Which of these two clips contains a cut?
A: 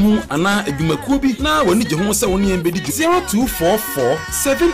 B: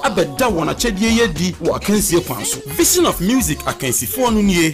A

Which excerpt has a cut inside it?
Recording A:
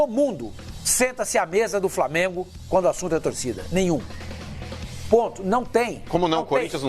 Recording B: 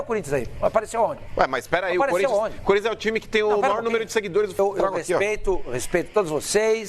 B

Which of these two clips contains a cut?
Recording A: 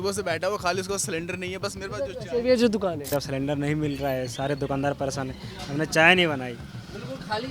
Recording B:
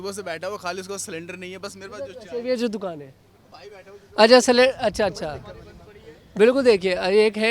A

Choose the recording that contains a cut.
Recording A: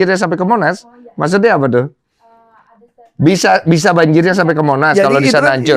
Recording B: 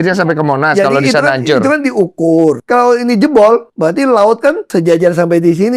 B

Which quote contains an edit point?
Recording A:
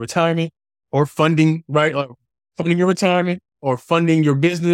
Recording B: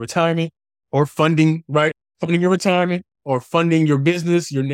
B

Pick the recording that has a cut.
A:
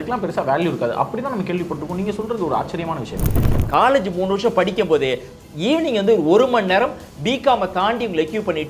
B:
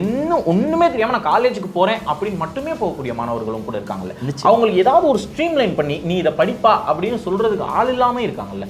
A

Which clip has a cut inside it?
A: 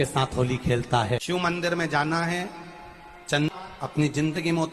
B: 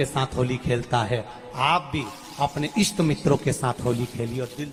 A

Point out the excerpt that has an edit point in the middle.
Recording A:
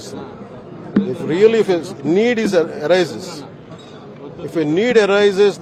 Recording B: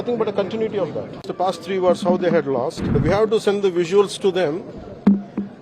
B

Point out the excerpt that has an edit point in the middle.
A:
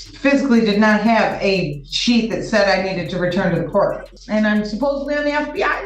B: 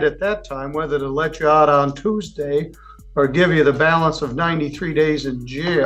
A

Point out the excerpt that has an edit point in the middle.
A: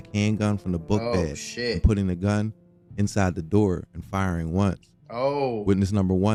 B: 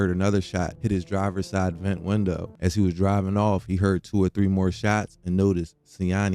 B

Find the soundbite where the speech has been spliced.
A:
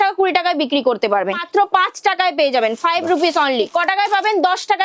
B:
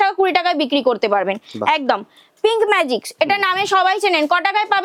A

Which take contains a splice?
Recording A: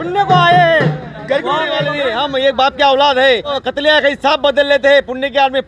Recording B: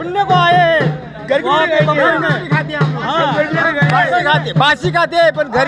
A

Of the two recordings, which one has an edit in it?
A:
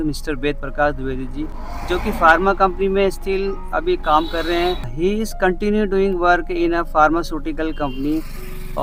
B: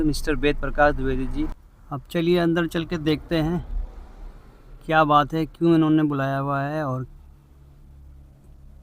B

